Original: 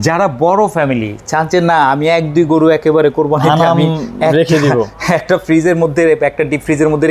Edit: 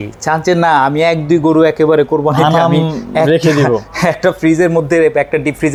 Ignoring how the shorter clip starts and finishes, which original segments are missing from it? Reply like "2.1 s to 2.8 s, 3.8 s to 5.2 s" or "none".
none